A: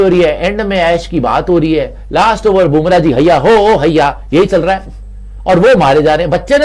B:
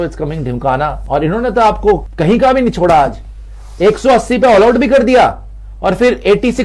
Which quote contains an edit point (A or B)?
B